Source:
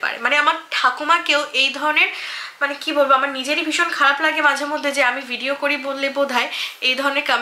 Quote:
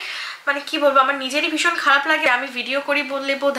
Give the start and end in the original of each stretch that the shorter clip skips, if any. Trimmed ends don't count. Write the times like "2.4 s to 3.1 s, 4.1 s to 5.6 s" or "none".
4.4 s to 5.0 s